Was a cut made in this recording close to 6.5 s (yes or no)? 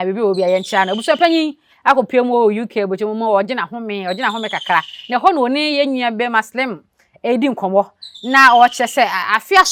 no